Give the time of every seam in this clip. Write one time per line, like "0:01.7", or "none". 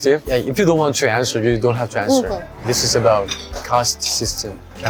none